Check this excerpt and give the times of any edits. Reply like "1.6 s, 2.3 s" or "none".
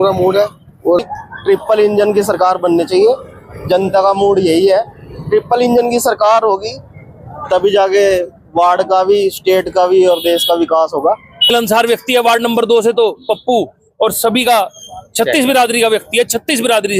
1.0 s, 11.5 s